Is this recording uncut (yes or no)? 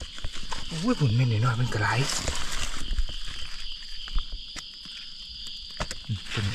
yes